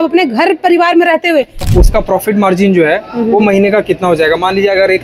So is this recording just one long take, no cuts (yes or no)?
no